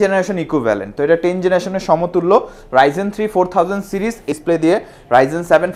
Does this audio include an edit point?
yes; 1 cut; at 4.3 s

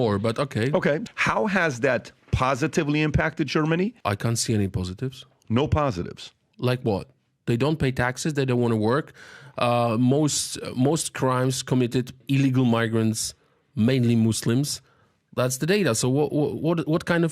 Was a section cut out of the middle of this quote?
yes; 3 cuts; at 1.0 s, 4.0 s, 12.2 s

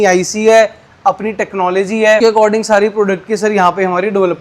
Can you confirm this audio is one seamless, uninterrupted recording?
no; 1 cut; at 2.2 s

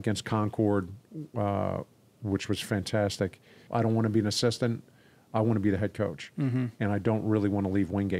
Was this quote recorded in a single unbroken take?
no; 1 cut; at 3.6 s

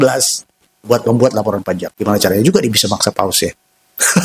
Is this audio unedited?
no; 1 cut; at 1.9 s

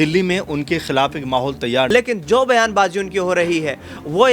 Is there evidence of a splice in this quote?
yes; 1 cut; at 1.9 s

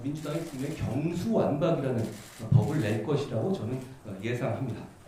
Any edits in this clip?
no; 0 cuts

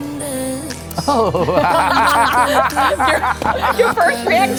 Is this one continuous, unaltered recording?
yes; 0 cuts

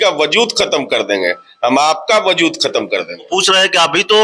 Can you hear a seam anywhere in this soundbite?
yes; 1 cut; at 3.2 s

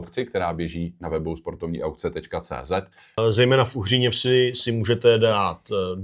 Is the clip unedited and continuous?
no; 1 cut; at 3.2 s

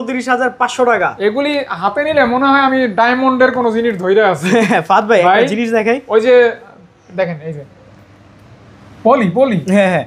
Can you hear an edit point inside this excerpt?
no; 0 cuts

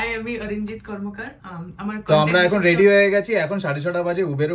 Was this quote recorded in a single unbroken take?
no; 1 cut; at 2.0 s

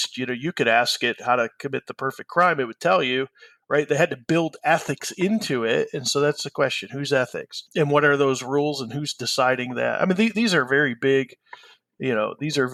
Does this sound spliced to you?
no; 0 cuts

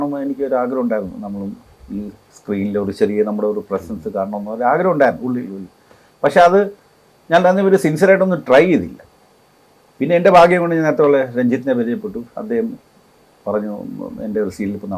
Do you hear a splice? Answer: no; 0 cuts

